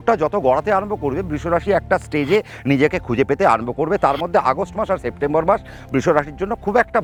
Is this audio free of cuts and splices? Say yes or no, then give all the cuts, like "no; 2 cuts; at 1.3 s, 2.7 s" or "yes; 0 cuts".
yes; 0 cuts